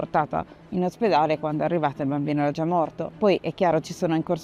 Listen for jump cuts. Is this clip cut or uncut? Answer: uncut